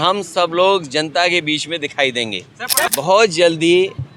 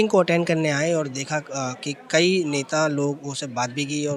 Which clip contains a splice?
first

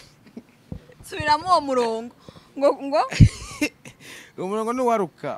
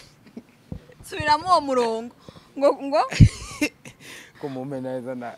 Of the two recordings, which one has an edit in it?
second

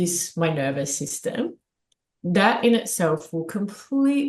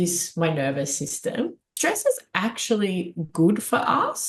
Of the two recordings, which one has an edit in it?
second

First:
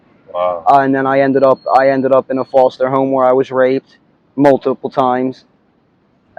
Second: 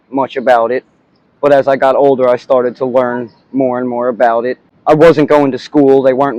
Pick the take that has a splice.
second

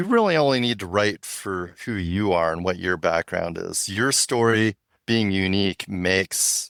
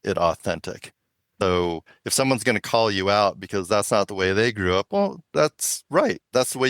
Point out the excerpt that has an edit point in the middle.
second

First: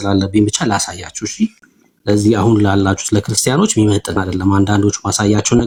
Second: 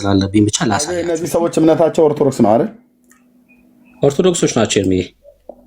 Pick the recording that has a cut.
second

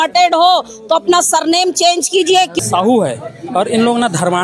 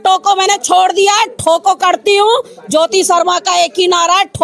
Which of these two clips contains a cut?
first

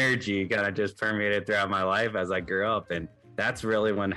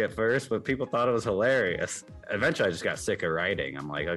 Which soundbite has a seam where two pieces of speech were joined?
second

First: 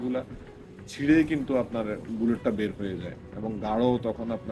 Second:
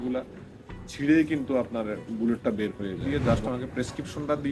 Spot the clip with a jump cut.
second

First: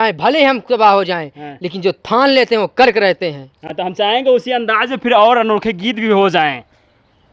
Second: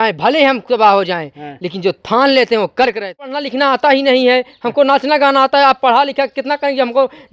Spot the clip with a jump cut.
second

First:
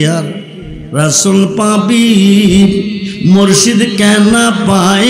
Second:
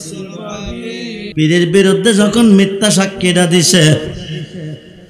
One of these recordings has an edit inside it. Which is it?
second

